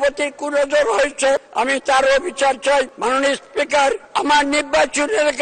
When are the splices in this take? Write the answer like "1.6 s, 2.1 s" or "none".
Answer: 1.5 s, 2.9 s, 4.0 s